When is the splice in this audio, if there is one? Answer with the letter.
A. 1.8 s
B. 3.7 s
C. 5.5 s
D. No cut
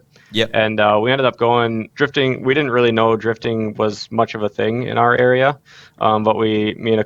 A